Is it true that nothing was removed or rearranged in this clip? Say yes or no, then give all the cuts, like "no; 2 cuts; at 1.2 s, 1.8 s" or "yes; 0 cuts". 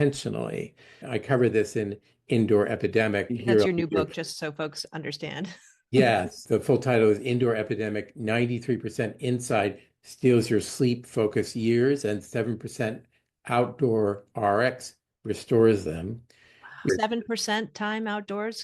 no; 2 cuts; at 1.0 s, 3.3 s